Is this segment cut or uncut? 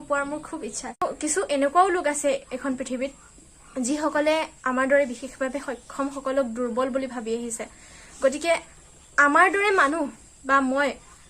cut